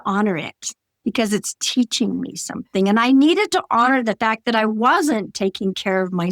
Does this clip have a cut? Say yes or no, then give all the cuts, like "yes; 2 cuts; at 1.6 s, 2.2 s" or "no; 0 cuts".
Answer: yes; 1 cut; at 2.7 s